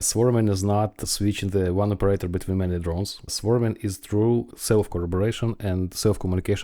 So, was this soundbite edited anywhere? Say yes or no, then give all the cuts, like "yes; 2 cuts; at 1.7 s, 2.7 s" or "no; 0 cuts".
yes; 2 cuts; at 3.2 s, 4.5 s